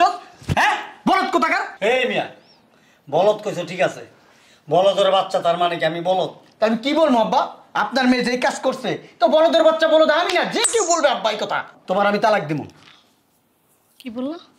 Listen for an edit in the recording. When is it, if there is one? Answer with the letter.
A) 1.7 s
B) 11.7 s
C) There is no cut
B